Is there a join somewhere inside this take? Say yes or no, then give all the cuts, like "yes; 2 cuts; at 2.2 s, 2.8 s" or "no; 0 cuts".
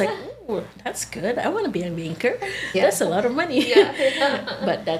no; 0 cuts